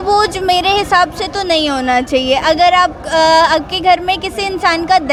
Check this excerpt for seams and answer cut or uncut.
uncut